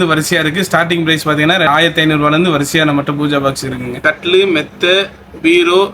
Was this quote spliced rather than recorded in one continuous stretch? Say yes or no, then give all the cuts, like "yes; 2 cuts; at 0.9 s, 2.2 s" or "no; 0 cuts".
yes; 2 cuts; at 1.7 s, 4.0 s